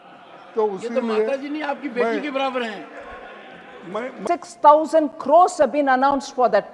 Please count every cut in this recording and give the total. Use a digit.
1